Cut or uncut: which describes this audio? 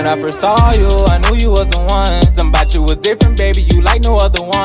uncut